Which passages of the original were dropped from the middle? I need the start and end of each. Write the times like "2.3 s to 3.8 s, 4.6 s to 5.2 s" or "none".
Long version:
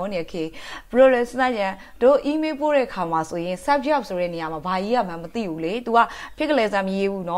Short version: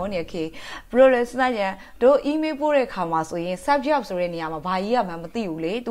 none